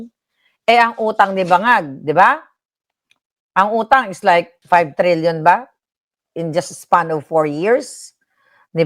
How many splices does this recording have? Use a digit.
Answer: 1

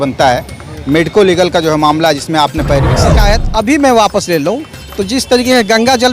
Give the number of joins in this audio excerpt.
1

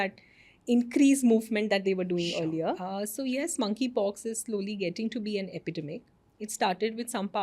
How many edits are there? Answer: 1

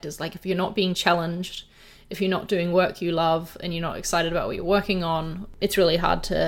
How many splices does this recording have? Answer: 1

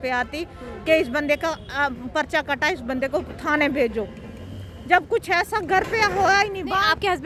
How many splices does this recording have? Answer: 0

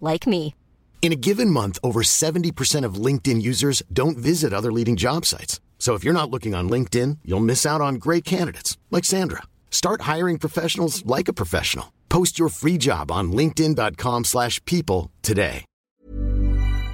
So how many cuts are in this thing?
1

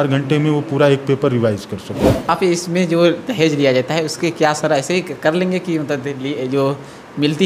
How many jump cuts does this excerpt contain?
1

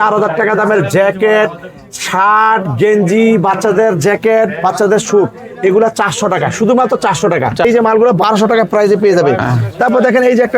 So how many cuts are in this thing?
1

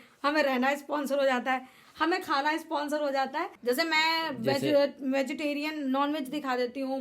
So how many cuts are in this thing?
1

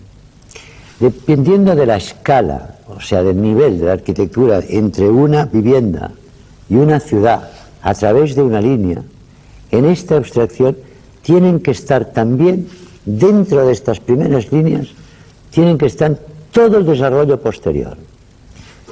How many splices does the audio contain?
1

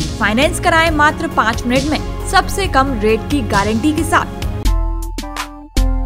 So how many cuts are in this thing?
1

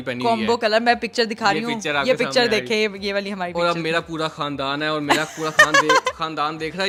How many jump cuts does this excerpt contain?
0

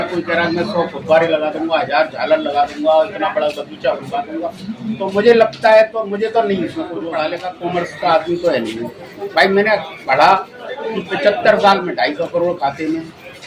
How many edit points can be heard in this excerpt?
1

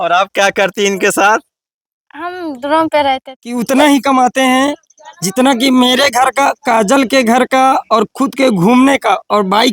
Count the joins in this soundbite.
1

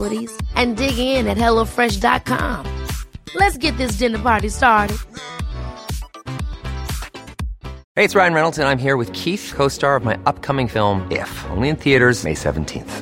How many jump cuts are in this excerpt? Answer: 1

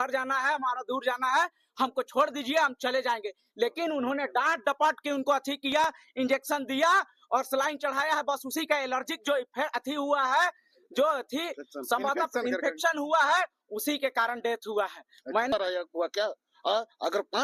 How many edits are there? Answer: 1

